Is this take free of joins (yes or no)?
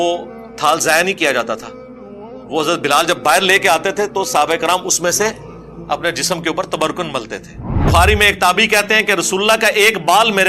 no